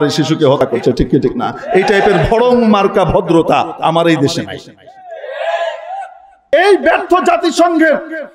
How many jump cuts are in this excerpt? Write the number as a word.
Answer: one